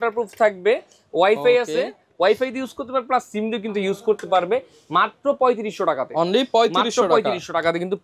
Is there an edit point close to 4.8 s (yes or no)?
no